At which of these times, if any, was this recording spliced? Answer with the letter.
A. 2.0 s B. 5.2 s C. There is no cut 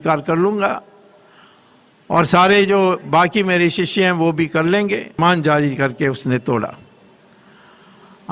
B